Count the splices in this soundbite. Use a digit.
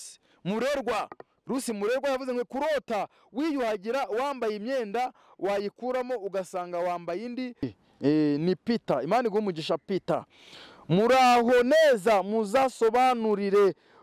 1